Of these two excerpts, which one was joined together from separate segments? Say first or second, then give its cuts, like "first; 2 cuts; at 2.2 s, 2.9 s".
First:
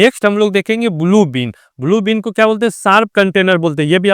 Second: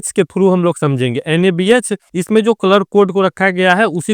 second; 1 cut; at 2.0 s